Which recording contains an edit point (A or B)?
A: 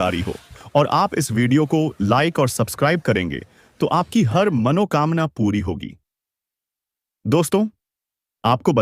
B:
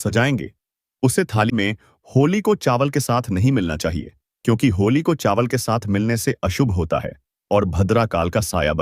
B